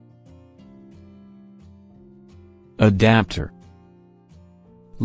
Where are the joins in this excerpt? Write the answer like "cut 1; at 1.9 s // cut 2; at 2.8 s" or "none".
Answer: none